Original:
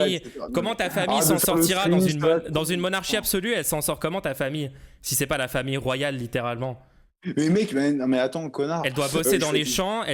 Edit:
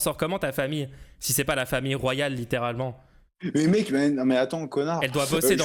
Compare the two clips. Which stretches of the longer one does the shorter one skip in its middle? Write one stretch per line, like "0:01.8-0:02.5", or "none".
none